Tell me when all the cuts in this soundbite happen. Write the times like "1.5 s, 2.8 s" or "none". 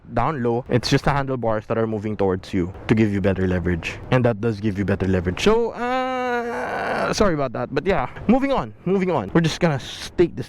9.3 s